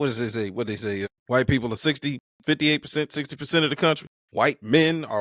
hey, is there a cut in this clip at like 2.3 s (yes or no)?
yes